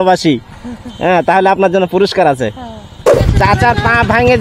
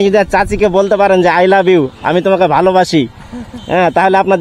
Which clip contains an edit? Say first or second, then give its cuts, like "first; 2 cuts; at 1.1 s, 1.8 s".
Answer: first; 1 cut; at 3.2 s